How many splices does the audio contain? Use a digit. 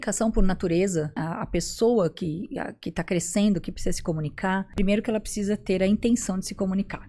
2